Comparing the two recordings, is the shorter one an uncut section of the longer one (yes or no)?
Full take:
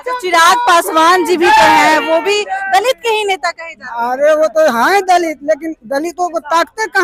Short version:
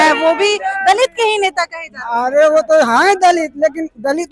yes